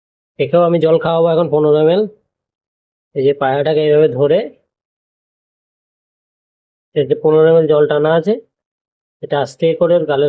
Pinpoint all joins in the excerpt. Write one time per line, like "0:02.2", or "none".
none